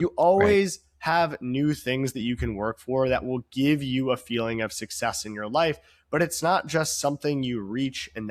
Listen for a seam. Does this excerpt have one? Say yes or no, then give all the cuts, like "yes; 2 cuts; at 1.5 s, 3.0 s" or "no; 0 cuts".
no; 0 cuts